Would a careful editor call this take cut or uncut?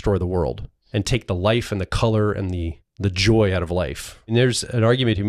cut